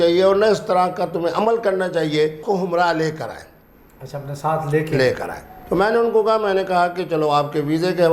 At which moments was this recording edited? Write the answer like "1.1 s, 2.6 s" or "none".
2.4 s

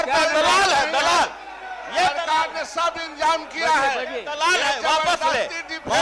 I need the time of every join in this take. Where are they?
none

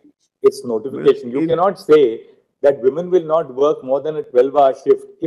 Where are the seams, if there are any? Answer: none

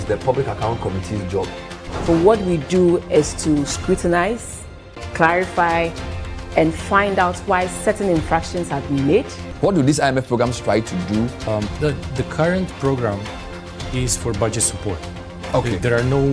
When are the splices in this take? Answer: none

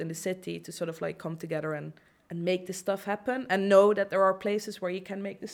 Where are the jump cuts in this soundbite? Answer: none

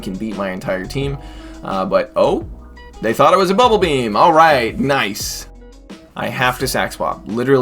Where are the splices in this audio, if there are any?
5.6 s

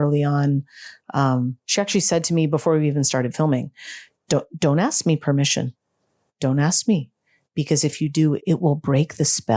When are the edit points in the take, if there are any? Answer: 8.4 s

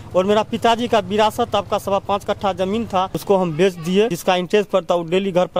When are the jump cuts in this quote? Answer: 3.2 s, 4.2 s

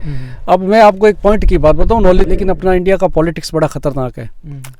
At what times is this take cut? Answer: 2.3 s

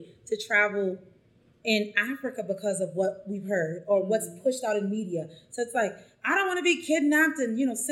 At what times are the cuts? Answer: none

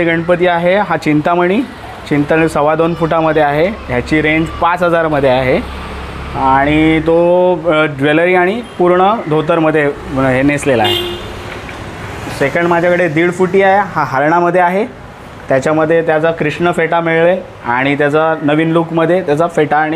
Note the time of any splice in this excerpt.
none

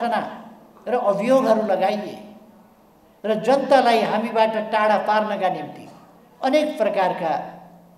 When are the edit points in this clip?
none

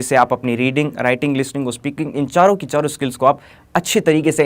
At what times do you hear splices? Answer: none

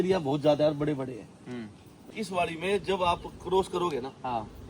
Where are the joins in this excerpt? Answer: 1.9 s

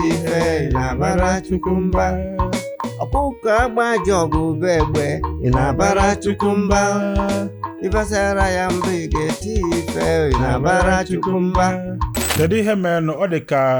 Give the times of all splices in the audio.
none

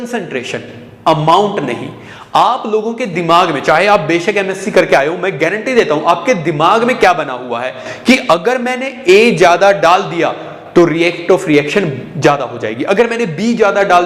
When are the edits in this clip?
none

